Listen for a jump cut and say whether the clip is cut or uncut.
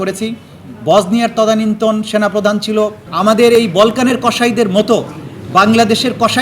cut